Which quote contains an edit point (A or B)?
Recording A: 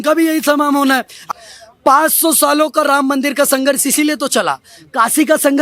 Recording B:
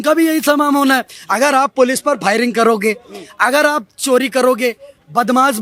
A